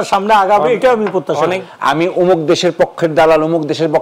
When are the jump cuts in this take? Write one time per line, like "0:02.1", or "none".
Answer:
0:01.6